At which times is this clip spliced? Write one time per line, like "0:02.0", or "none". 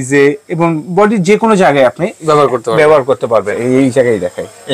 0:03.5